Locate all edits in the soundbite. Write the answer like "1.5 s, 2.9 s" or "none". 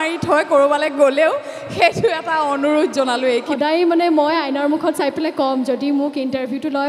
3.5 s